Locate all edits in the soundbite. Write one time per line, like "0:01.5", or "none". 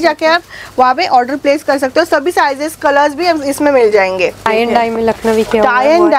0:04.5